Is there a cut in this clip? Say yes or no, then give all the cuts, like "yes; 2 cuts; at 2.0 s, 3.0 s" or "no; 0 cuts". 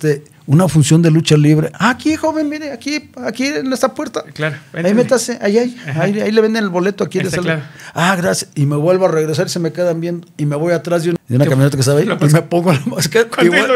yes; 1 cut; at 11.2 s